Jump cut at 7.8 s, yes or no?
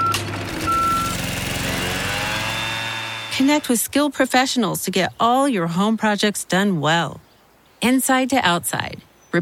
no